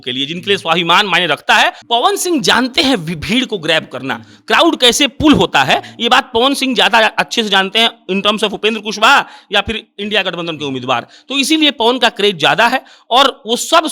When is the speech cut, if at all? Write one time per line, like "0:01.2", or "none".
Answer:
0:01.8